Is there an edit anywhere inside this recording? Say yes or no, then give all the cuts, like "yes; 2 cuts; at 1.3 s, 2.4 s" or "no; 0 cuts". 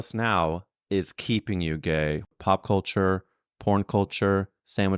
yes; 1 cut; at 2.3 s